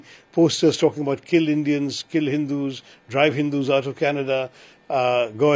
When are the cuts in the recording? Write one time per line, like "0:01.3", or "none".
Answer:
none